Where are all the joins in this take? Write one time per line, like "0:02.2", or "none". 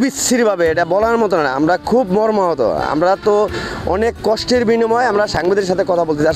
none